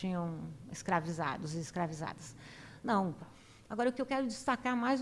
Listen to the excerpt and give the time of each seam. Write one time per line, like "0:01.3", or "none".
0:03.3